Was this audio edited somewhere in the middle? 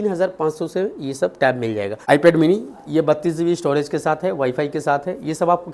yes; 1 cut; at 2.0 s

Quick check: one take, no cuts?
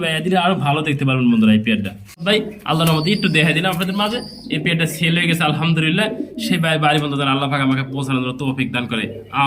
no; 1 cut; at 2.2 s

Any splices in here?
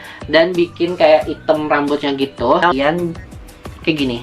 yes; 1 cut; at 2.7 s

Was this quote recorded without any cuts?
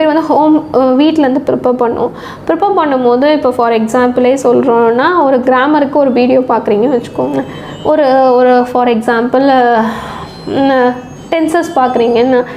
yes; 0 cuts

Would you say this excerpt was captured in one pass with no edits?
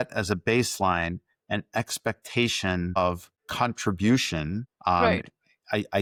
yes; 0 cuts

